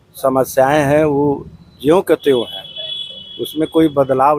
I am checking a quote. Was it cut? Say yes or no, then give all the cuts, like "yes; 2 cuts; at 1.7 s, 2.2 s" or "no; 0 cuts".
no; 0 cuts